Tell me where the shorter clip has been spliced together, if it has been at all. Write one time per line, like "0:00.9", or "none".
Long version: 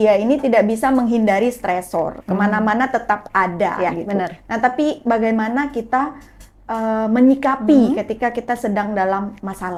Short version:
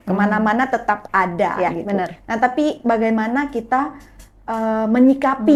none